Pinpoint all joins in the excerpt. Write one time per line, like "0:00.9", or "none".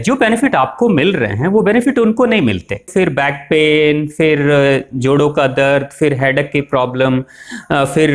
0:02.9